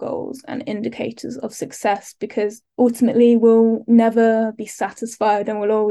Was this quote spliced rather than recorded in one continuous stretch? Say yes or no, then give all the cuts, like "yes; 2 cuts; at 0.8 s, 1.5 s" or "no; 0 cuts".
no; 0 cuts